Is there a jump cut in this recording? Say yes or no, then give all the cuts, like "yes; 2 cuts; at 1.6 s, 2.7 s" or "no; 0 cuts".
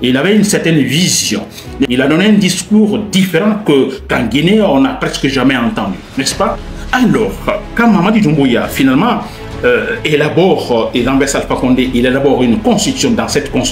no; 0 cuts